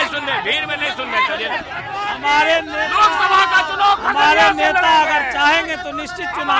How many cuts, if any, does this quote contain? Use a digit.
1